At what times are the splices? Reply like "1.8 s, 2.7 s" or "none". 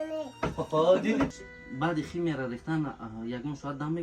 1.3 s